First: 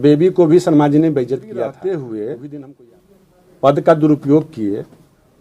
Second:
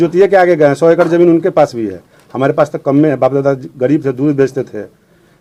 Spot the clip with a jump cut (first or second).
first